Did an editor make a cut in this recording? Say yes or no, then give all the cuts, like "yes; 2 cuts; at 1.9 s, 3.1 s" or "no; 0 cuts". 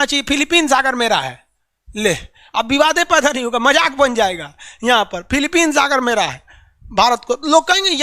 no; 0 cuts